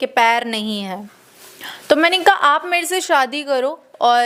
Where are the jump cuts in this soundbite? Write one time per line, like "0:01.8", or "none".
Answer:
none